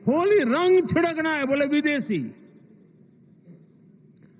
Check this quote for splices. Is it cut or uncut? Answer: uncut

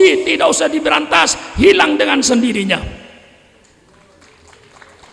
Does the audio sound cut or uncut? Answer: uncut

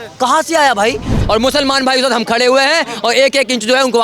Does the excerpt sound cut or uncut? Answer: cut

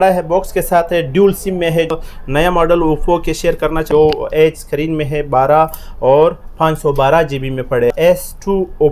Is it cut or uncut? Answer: cut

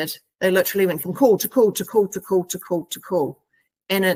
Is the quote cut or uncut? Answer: uncut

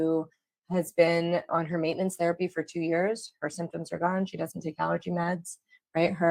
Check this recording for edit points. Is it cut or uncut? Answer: cut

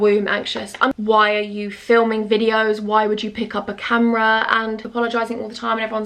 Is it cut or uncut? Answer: cut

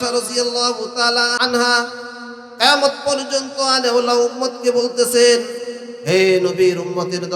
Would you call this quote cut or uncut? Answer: cut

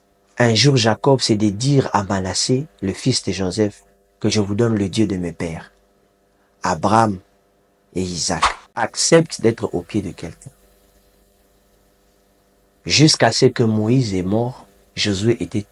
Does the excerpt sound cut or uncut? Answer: cut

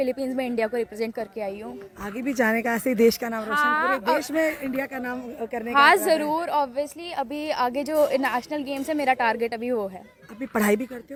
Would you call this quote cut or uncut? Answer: uncut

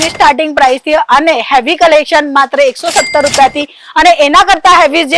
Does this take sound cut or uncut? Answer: uncut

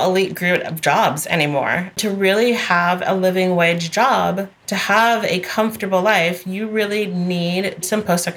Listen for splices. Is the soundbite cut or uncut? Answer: uncut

